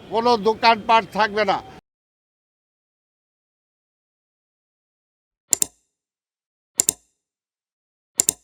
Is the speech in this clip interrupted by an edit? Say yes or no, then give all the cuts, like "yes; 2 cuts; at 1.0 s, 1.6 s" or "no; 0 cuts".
no; 0 cuts